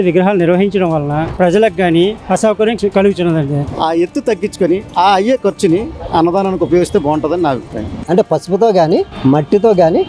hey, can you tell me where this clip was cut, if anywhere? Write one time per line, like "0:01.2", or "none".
0:02.8
0:03.7
0:08.0